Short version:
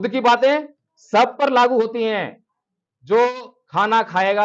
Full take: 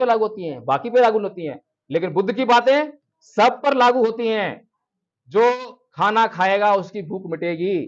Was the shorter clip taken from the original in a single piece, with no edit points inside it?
yes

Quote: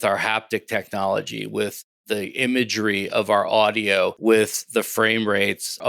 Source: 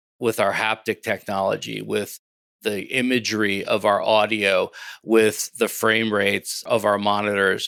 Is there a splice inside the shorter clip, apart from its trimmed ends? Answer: yes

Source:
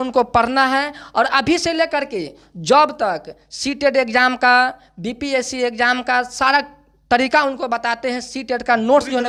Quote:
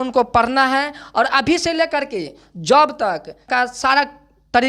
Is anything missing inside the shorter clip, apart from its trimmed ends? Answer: yes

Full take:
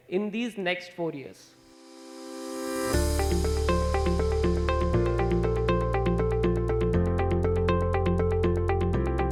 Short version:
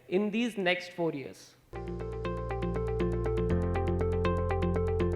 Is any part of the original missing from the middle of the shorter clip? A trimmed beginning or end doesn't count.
yes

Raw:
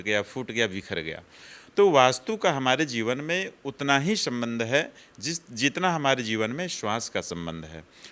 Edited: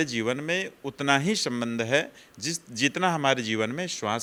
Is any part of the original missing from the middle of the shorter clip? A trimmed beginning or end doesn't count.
no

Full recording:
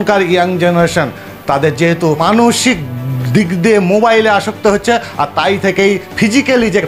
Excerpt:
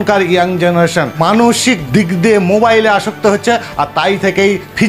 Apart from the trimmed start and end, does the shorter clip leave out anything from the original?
yes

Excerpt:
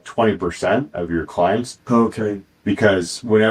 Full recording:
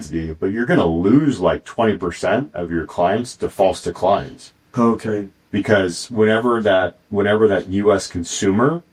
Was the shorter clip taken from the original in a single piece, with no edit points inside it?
no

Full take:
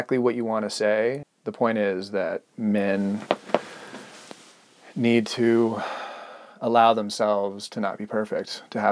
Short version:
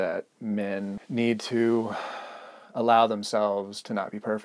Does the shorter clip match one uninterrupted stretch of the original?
no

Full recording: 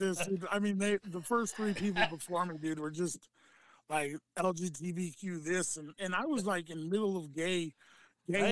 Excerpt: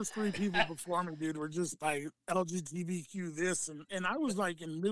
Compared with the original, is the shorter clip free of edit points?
no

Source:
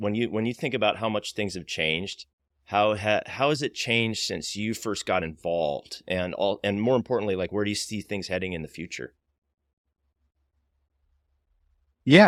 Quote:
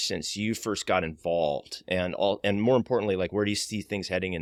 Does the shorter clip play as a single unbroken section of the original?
yes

